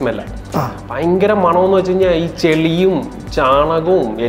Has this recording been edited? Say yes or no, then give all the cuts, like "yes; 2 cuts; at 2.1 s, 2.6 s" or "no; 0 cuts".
no; 0 cuts